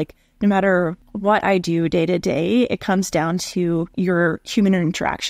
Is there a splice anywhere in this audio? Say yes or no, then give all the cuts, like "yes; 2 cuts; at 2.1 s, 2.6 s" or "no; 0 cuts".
yes; 2 cuts; at 1.1 s, 3.9 s